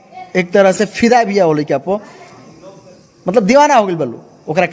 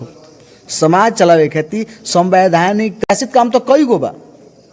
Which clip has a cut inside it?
second; 1 cut; at 3.0 s

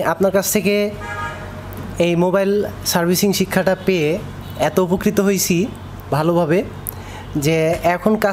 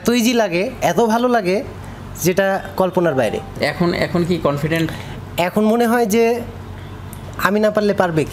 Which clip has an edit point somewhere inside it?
second; 1 cut; at 3.6 s

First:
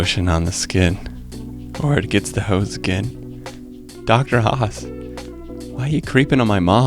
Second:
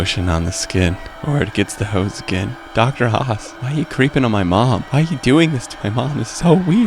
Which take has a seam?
second; 4 cuts; at 1.1 s, 2.6 s, 3.5 s, 4.9 s

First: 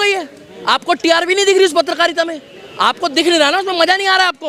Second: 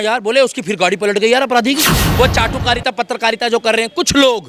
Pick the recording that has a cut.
second; 1 cut; at 2.0 s

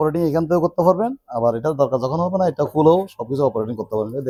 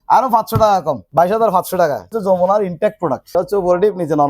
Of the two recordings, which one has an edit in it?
second; 3 cuts; at 1.0 s, 2.2 s, 3.2 s

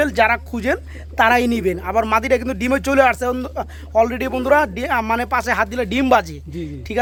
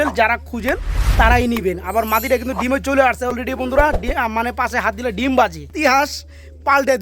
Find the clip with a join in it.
second; 2 cuts; at 3.3 s, 5.7 s

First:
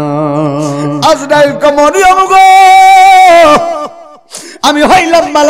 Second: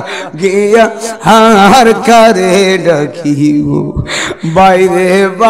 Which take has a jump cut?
first; 1 cut; at 0.9 s

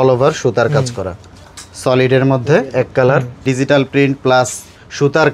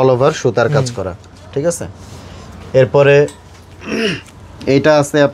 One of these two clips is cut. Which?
first; 2 cuts; at 1.4 s, 3.4 s

